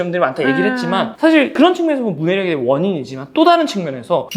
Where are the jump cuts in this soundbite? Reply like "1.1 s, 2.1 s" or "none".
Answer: none

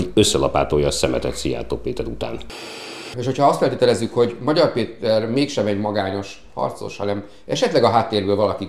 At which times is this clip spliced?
3.0 s

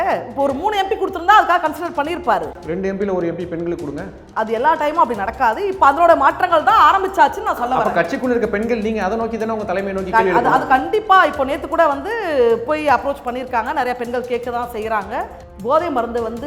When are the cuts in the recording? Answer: 2.5 s, 4.2 s, 15.4 s

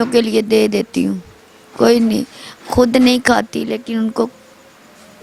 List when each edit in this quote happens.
none

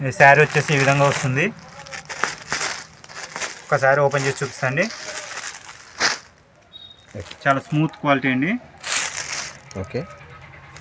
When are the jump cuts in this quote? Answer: 7.3 s

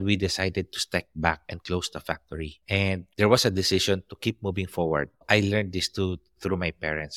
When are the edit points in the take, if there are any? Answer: 5.2 s

